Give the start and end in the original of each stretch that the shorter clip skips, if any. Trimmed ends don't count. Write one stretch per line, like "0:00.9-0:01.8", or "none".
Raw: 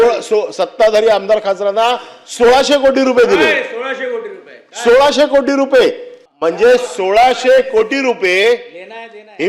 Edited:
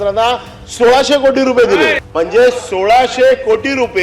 0:03.6-0:06.3